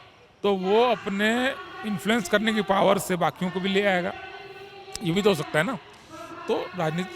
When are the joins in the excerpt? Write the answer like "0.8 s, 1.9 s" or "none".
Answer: none

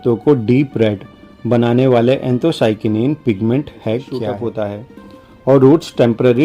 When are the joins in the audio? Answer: 4.4 s

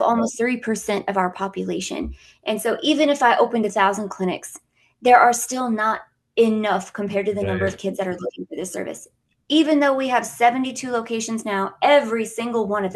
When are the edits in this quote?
none

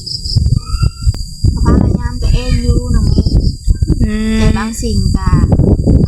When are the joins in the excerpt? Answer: 1.2 s

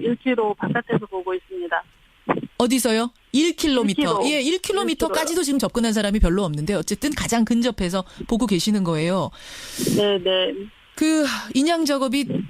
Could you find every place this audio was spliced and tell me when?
10.6 s

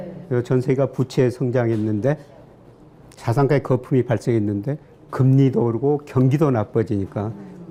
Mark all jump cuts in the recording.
none

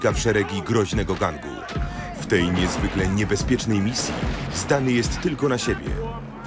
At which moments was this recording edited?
none

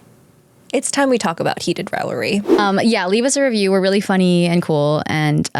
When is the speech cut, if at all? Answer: 2.6 s

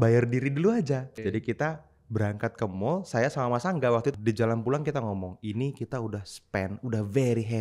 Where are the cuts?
1.1 s, 4.1 s

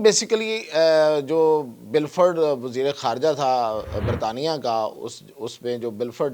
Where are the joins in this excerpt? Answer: none

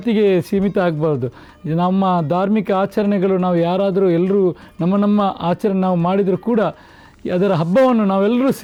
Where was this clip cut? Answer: none

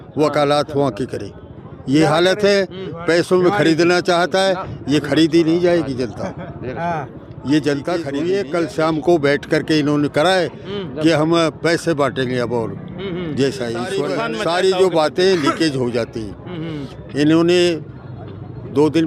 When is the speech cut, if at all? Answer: 8.1 s, 14.0 s

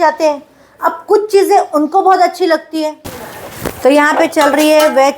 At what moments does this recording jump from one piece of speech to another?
3.1 s

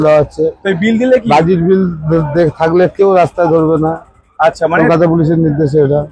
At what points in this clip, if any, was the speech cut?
none

